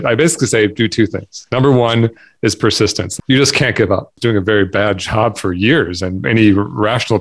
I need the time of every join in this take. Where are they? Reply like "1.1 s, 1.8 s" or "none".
3.1 s, 4.2 s